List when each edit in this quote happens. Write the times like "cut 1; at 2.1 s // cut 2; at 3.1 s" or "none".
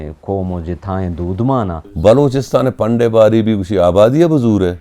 cut 1; at 1.8 s